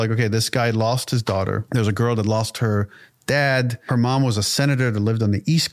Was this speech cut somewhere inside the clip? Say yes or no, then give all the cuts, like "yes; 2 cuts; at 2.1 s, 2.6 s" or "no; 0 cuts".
yes; 2 cuts; at 1.6 s, 3.8 s